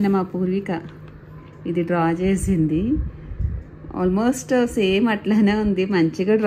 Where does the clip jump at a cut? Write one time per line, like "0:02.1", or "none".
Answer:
none